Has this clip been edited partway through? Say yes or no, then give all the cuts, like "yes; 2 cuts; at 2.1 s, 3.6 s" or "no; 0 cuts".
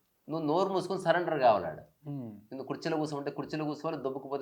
no; 0 cuts